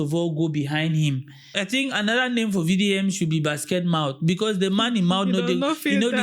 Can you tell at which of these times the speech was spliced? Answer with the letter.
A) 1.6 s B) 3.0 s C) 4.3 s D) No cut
A